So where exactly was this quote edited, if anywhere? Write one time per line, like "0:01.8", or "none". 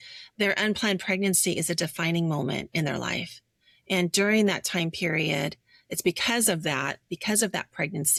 none

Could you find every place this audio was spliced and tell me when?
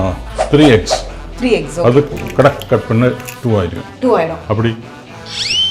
none

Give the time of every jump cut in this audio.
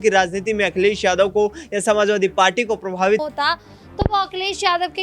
0:03.2

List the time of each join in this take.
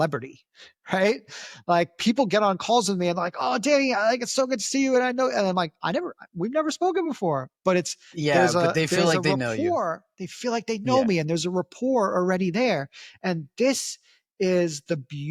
none

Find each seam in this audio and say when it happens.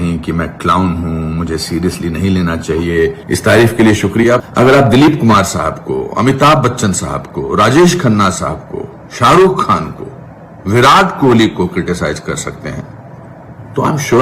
0:03.2
0:04.4

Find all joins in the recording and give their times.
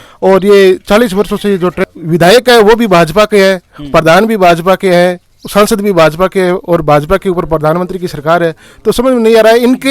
0:01.8

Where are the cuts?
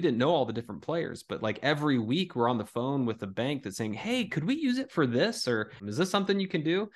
0:05.8

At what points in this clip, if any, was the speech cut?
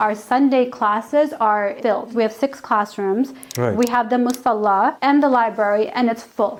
none

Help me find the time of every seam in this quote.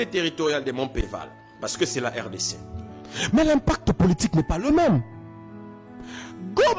0:01.0

